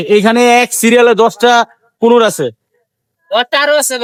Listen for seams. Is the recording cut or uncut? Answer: uncut